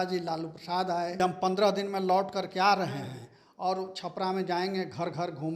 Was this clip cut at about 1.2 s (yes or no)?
yes